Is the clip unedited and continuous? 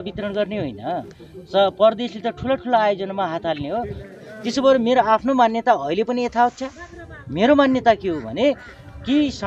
no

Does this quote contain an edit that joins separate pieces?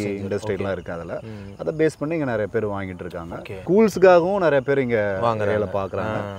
no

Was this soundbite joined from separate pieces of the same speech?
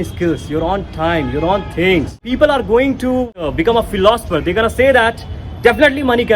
yes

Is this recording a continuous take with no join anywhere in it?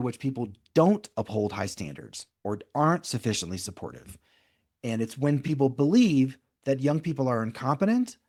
yes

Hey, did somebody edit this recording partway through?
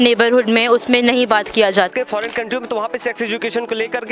yes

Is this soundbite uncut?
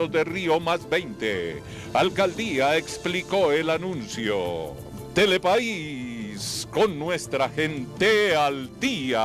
no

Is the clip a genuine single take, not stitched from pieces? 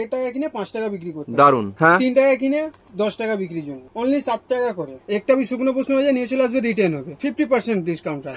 no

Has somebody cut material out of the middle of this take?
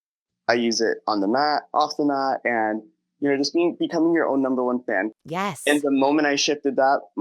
yes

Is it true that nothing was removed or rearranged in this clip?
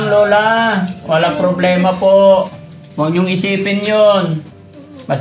yes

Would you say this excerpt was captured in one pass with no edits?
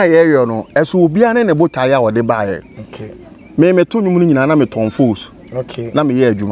yes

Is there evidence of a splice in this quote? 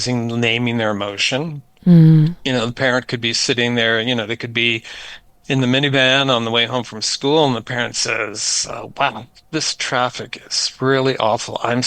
no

